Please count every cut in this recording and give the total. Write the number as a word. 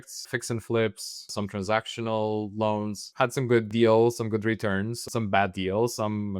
one